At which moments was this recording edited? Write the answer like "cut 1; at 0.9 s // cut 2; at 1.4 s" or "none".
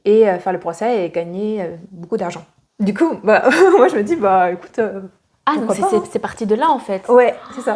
none